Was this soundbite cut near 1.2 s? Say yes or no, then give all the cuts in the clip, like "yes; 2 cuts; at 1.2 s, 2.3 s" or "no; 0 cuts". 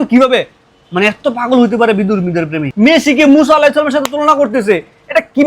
no; 1 cut; at 2.6 s